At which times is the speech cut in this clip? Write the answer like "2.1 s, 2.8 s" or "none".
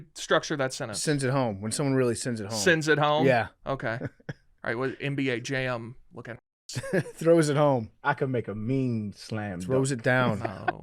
7.9 s